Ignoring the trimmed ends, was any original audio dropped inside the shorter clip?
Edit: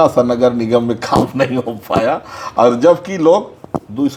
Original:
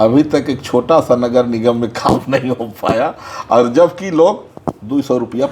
no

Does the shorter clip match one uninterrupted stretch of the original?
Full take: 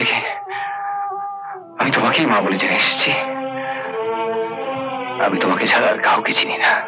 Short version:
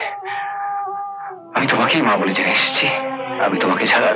no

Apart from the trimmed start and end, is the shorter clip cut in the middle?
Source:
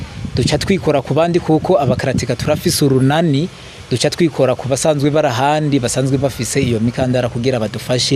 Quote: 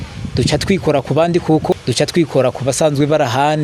yes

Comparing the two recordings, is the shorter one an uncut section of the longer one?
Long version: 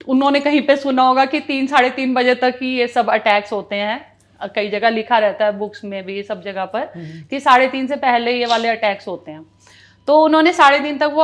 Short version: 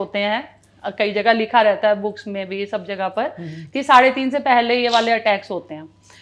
yes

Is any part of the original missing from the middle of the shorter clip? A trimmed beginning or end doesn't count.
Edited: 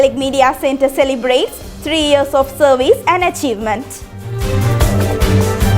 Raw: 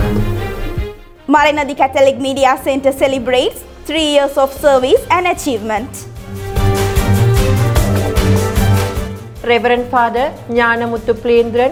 yes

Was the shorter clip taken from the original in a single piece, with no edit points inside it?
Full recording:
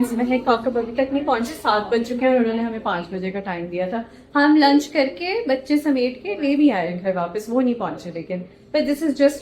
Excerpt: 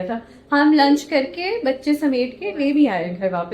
yes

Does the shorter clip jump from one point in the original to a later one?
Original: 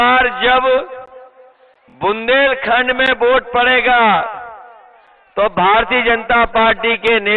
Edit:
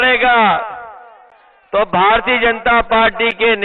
no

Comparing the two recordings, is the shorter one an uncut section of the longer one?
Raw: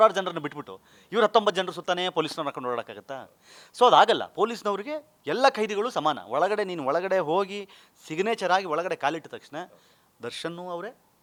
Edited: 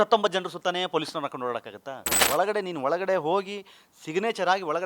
no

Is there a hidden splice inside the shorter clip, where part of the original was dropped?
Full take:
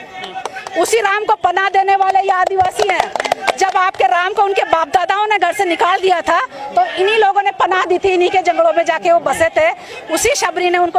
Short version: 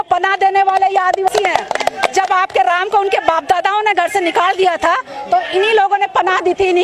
yes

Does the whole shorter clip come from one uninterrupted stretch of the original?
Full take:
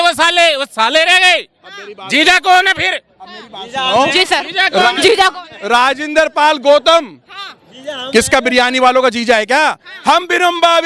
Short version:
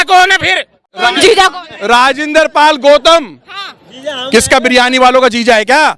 no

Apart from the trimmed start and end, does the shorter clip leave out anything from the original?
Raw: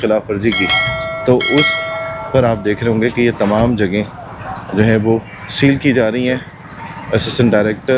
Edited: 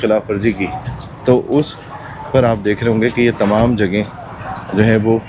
no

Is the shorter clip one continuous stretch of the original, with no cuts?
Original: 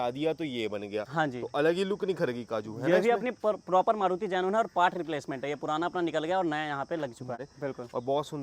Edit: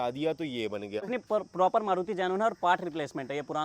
no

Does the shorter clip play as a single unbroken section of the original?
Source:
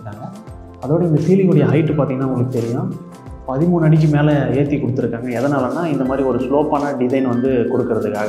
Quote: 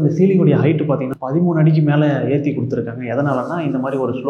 no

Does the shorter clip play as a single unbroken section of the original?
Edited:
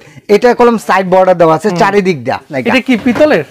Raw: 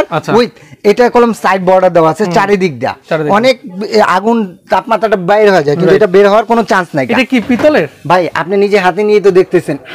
no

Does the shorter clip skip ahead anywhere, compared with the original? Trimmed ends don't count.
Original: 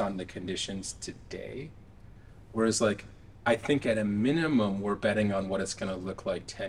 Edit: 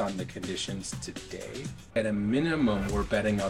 yes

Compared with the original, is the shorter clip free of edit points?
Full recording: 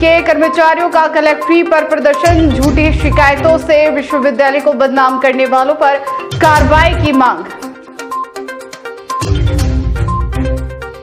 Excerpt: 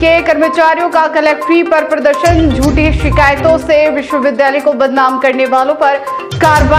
yes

